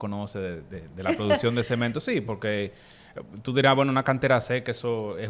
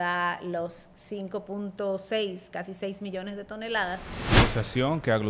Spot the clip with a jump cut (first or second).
second